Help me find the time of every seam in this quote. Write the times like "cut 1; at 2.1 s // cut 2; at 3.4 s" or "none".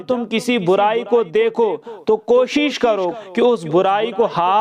cut 1; at 3.1 s